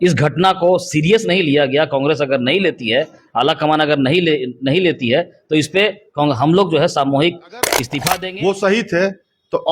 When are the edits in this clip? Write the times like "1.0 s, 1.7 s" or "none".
7.9 s